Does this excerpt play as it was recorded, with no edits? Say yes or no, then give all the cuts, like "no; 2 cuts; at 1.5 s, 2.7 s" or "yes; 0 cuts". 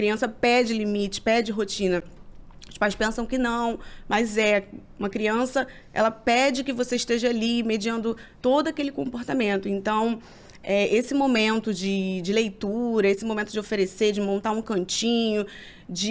yes; 0 cuts